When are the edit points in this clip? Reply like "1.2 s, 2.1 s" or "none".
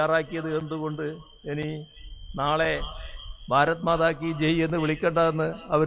none